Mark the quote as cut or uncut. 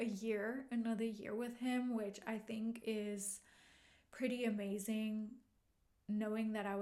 uncut